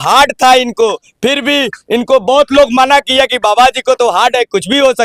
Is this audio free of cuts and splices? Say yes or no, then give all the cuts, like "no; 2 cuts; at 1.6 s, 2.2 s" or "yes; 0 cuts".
yes; 0 cuts